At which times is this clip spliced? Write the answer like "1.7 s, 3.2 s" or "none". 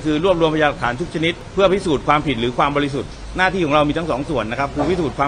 1.4 s